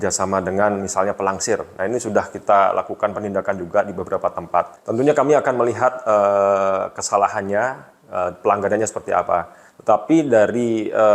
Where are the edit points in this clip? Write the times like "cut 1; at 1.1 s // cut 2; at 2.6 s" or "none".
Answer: cut 1; at 4.8 s